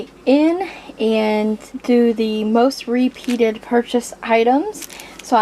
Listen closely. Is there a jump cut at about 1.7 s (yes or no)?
yes